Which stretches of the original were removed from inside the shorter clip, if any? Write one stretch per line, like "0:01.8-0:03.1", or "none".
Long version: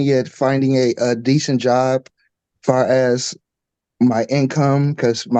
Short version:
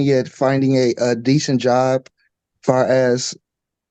none